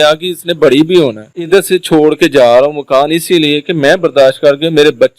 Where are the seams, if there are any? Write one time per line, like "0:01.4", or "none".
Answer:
0:01.4